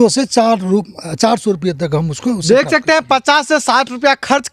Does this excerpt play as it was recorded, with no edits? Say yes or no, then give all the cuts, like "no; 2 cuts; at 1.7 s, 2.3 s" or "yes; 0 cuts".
yes; 0 cuts